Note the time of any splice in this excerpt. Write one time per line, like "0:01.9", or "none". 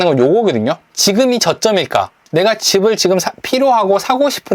0:00.9
0:02.2